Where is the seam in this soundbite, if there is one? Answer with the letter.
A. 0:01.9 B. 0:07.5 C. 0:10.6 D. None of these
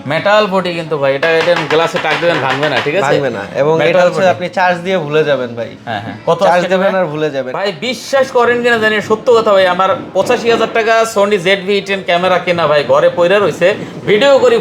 B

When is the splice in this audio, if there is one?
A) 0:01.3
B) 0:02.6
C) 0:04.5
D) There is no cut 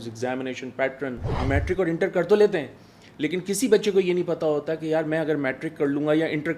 A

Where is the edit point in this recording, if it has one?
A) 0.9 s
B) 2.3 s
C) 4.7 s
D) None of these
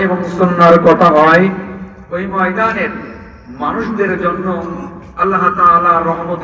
D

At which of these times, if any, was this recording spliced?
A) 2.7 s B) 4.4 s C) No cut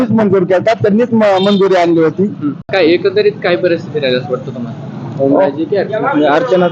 A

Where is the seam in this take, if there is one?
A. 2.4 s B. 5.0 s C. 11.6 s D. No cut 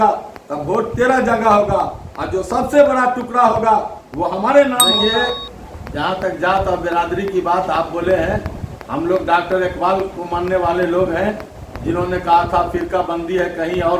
B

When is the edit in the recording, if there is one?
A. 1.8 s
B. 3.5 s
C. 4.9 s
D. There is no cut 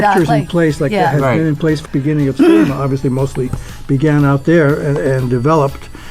A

